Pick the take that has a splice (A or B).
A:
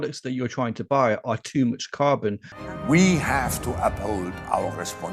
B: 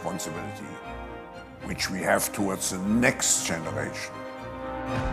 A